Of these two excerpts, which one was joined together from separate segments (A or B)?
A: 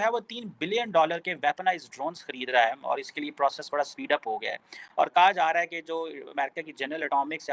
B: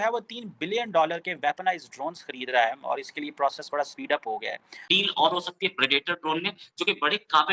B